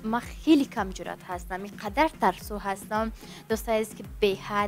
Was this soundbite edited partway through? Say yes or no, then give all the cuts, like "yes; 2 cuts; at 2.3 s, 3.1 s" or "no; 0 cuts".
no; 0 cuts